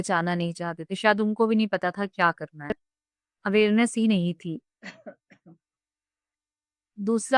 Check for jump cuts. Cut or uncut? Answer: uncut